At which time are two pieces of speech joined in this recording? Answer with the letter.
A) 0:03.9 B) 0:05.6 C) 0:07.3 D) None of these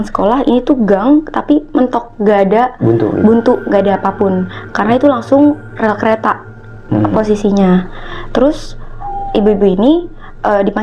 D